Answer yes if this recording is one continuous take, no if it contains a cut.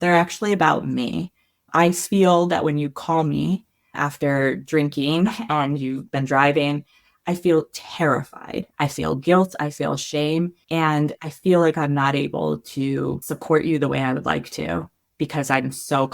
no